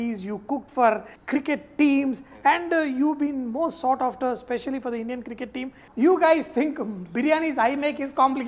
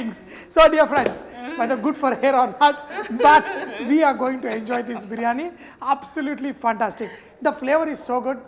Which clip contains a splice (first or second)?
first